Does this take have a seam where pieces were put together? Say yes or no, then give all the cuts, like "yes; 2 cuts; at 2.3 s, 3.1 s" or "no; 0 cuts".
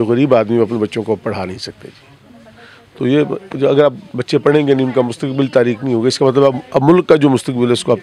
no; 0 cuts